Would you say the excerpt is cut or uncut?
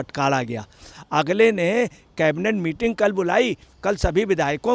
cut